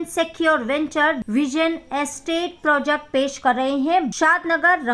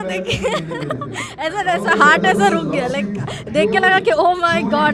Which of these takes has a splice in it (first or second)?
first